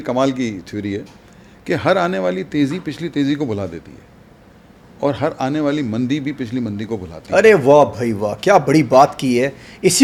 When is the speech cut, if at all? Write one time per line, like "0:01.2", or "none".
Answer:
none